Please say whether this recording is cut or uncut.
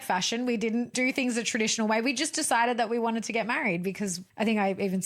cut